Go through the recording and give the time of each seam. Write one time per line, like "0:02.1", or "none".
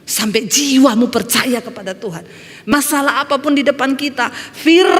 0:02.7